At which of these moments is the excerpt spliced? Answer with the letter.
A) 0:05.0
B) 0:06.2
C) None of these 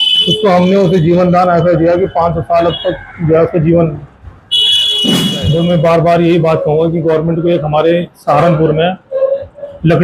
A